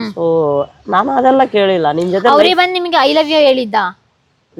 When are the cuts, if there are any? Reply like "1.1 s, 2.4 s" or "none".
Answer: none